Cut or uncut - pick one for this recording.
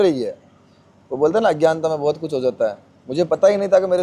uncut